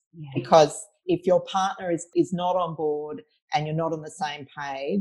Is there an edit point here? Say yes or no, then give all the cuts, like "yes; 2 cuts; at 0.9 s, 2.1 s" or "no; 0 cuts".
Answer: yes; 2 cuts; at 1.0 s, 2.1 s